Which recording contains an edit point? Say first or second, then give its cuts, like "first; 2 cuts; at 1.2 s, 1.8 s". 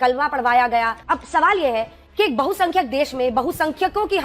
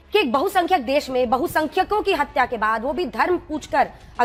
first; 1 cut; at 1.0 s